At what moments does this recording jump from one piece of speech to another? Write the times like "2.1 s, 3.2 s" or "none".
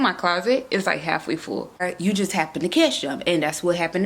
1.8 s